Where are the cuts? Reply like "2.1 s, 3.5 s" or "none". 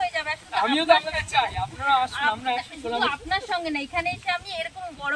none